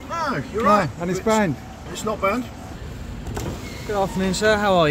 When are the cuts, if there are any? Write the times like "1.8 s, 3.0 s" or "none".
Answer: none